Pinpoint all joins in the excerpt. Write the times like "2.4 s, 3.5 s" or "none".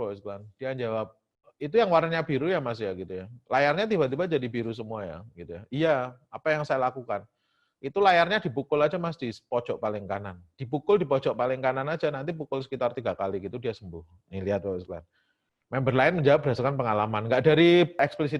none